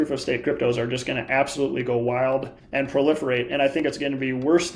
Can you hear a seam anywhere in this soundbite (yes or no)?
yes